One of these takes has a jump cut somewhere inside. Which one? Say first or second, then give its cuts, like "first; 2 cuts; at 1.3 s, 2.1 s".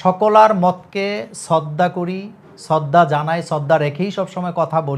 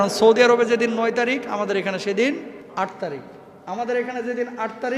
second; 1 cut; at 2.6 s